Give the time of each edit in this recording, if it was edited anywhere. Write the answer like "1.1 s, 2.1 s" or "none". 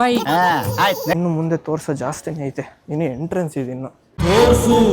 1.1 s